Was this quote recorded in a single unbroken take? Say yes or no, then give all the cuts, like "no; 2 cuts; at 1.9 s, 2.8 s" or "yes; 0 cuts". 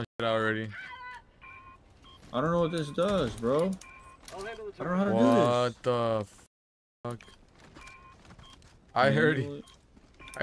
yes; 0 cuts